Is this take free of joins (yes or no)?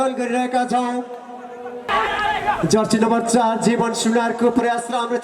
no